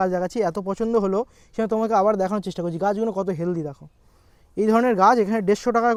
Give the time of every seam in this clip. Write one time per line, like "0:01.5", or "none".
none